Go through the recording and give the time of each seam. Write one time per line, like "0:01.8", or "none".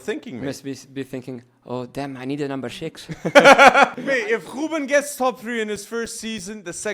0:04.0